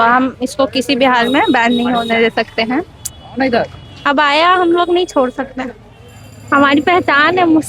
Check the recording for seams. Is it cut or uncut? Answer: cut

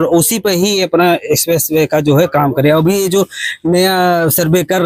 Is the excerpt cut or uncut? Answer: uncut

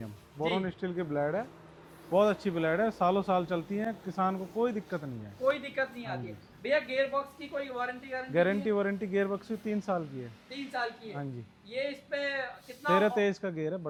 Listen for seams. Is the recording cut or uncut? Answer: uncut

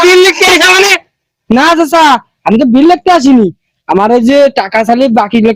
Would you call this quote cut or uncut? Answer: uncut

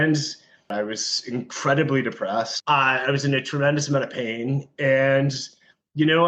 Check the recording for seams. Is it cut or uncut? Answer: cut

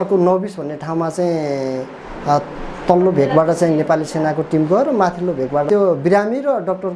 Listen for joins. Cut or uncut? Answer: cut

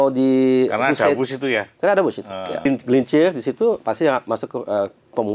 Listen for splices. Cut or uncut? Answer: cut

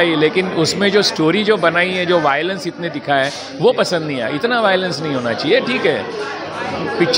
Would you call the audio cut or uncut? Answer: uncut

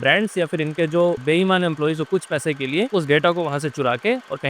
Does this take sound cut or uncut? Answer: cut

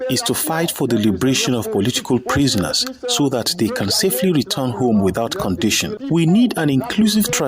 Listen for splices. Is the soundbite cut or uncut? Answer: cut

